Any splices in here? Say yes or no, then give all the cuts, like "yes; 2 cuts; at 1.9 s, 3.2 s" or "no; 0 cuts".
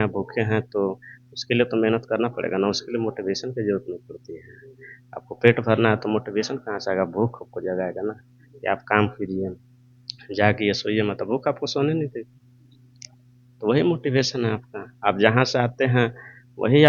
no; 0 cuts